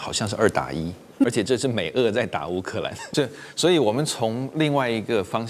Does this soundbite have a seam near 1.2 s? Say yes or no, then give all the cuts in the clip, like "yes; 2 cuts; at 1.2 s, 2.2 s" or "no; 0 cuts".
yes; 2 cuts; at 1.2 s, 3.0 s